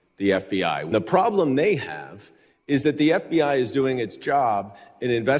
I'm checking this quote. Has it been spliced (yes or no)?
yes